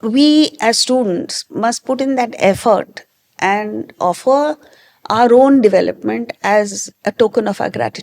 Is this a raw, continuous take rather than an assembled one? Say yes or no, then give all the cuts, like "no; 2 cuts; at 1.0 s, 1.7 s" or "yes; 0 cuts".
no; 1 cut; at 6.8 s